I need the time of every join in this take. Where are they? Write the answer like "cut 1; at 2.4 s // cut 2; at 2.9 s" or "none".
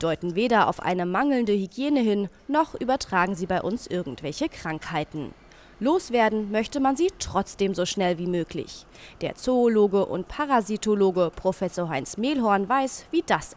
cut 1; at 2.8 s